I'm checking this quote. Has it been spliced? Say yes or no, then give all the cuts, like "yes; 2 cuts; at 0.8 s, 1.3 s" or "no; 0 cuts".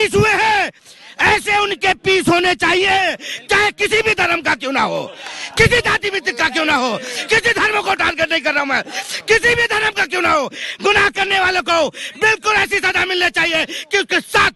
no; 0 cuts